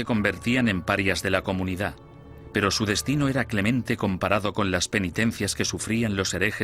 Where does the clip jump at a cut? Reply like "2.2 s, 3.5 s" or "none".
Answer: 5.7 s